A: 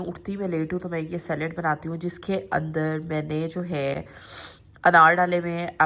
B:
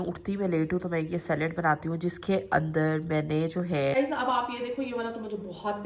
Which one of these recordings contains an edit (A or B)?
B